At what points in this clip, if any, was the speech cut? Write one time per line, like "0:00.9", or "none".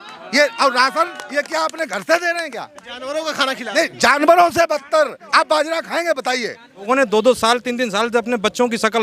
0:06.8